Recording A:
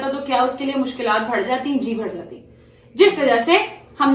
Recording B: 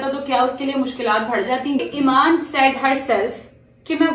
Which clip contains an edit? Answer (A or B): B